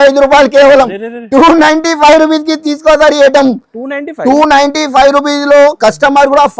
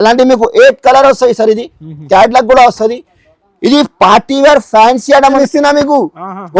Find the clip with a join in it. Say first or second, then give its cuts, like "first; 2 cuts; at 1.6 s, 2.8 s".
second; 1 cut; at 5.4 s